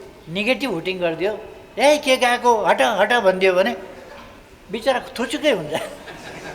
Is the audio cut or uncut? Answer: uncut